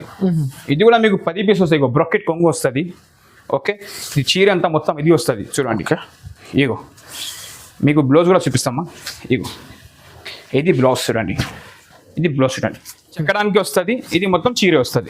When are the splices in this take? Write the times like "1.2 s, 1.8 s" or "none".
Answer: 13.2 s